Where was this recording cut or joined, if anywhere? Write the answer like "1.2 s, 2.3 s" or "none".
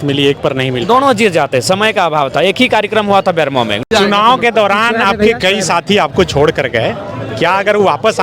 3.8 s